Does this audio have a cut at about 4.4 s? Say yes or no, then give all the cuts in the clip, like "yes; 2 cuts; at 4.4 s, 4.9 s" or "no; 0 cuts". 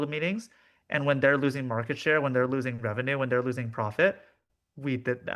yes; 1 cut; at 4.4 s